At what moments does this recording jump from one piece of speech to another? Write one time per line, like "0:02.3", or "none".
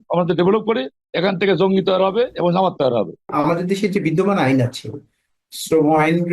0:03.3